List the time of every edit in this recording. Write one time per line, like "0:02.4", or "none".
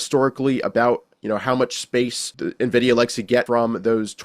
0:02.3
0:03.5